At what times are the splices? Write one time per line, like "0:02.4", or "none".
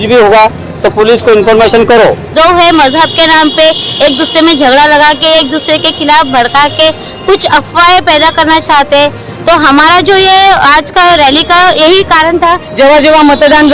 0:02.2
0:12.7